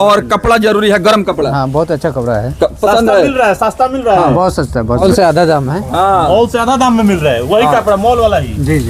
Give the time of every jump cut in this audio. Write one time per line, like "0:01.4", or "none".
0:05.0

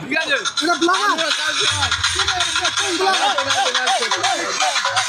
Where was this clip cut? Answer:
none

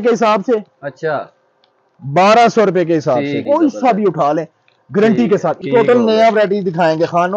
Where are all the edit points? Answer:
0:03.4
0:05.6

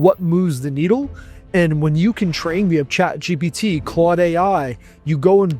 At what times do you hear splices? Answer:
none

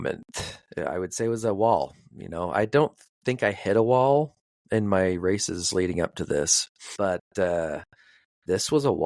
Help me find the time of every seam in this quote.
0:06.8

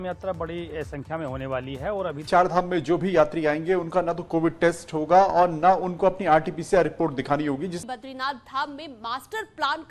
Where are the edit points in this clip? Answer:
0:02.2
0:07.8

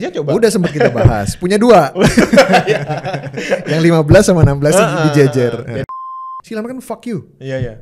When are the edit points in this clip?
0:05.8

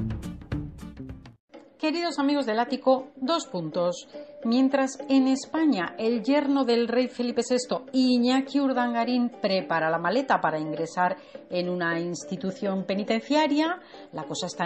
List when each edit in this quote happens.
none

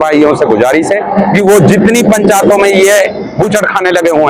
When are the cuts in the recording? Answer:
none

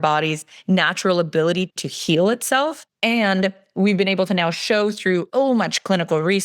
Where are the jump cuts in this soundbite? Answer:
0:02.9
0:05.3

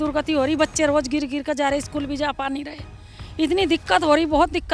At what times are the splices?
none

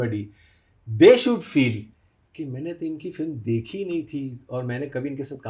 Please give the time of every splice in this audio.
none

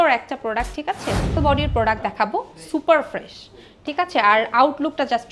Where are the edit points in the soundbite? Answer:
0:01.4

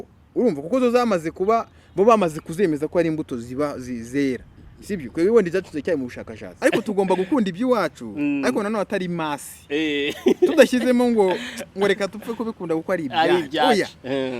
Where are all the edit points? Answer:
0:06.6

